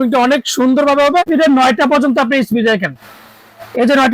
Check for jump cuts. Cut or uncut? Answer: cut